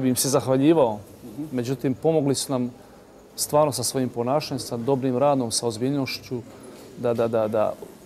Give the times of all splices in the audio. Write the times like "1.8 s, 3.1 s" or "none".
none